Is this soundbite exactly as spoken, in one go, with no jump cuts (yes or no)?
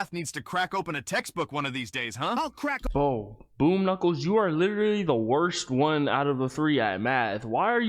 yes